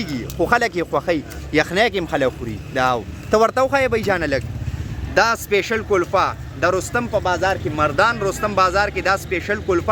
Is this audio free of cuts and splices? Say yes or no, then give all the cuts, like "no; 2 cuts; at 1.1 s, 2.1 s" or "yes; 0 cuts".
yes; 0 cuts